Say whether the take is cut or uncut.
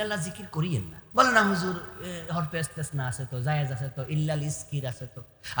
cut